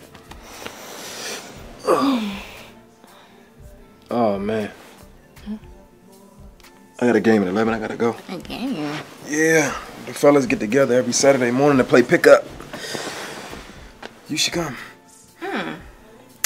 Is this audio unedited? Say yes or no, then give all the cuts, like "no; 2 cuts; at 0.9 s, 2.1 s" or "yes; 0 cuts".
no; 1 cut; at 7.5 s